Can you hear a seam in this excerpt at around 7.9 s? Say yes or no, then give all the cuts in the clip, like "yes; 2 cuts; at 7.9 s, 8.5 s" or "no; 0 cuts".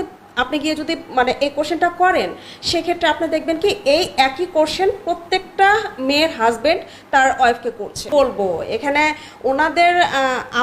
yes; 1 cut; at 7.9 s